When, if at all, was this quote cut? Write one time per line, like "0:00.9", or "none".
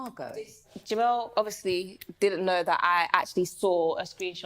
0:03.5